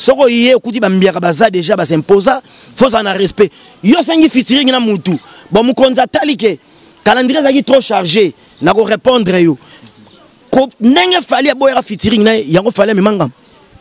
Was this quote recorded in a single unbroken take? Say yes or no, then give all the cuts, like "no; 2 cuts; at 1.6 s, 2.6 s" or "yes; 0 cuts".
yes; 0 cuts